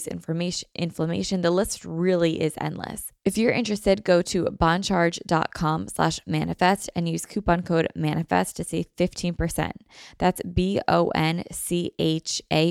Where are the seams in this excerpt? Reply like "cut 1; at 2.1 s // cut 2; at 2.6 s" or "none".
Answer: cut 1; at 3.0 s